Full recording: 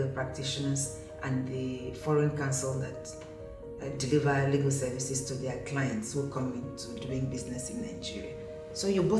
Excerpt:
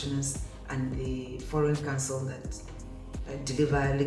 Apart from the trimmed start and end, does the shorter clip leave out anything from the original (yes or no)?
no